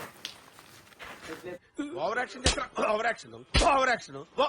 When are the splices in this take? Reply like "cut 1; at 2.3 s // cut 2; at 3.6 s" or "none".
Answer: cut 1; at 1.7 s